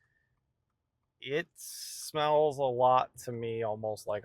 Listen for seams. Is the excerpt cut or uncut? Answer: uncut